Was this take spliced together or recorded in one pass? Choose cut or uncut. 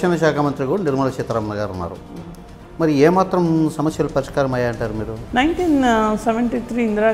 cut